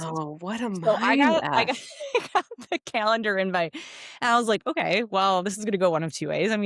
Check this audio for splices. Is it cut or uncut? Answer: uncut